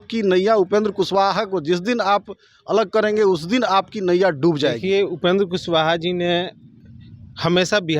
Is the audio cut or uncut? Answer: cut